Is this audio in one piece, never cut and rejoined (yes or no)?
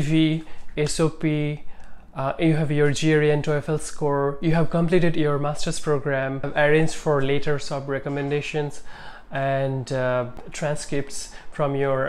no